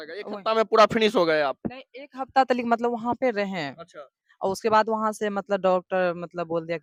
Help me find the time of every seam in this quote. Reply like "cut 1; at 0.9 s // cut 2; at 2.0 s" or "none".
none